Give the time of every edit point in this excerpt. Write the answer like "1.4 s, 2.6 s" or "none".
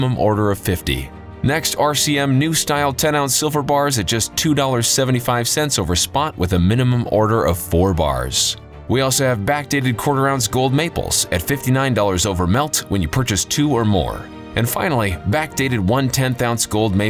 none

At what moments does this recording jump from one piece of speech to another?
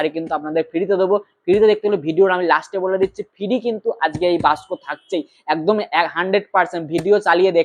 none

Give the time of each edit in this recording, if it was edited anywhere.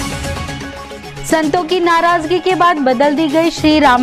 1.0 s

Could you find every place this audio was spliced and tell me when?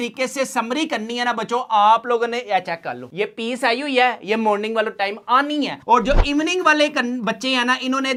none

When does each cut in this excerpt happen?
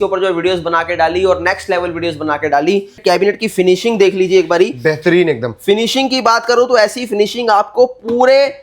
3.0 s

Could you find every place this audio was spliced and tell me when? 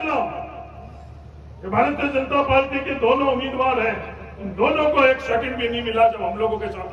none

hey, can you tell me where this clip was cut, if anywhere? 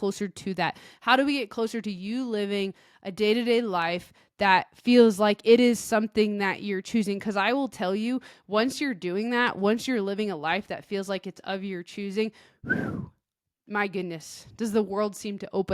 none

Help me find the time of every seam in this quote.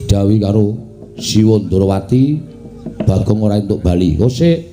3.0 s

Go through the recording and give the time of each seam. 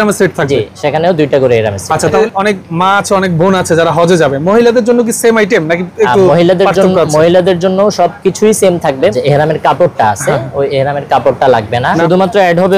2.2 s, 9.1 s, 12.0 s

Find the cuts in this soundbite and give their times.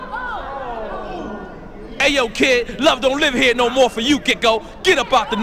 1.9 s

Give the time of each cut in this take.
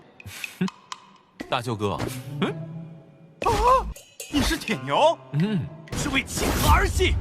5.9 s

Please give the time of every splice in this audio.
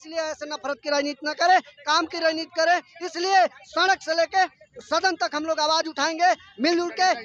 none

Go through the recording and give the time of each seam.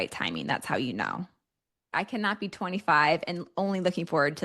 1.9 s

